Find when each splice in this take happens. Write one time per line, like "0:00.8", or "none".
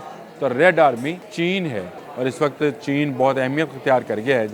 0:01.3
0:02.0